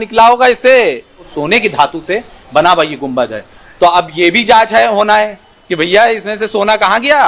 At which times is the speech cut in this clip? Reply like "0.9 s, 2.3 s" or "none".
1.3 s